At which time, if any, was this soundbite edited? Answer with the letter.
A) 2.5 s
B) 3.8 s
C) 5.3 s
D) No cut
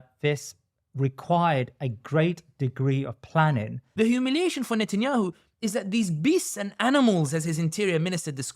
B